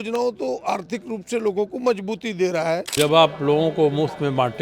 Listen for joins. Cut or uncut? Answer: cut